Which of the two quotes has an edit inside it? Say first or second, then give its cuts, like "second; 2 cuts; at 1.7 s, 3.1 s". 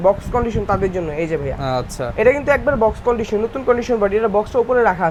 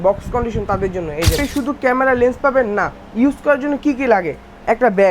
second; 1 cut; at 1.4 s